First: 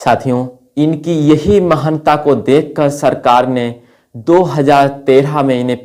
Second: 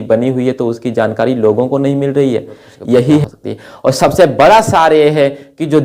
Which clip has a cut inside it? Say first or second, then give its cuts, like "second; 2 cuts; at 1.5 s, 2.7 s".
second; 1 cut; at 3.2 s